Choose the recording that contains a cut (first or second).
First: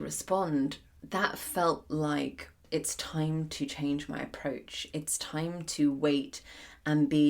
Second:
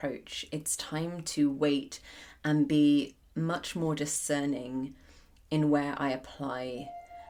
first